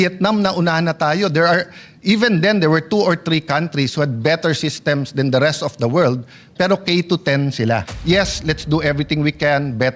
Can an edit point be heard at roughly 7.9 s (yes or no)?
yes